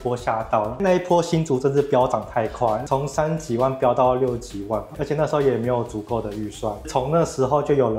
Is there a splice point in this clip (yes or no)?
no